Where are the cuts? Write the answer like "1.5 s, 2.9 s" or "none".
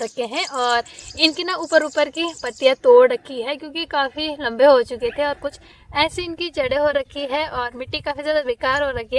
none